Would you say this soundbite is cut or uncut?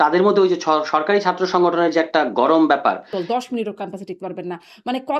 cut